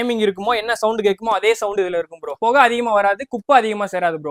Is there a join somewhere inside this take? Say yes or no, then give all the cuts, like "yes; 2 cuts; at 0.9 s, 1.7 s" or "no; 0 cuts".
no; 0 cuts